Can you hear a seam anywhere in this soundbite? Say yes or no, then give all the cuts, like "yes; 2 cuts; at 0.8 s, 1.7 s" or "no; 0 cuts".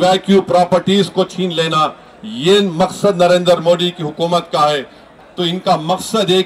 yes; 1 cut; at 5.1 s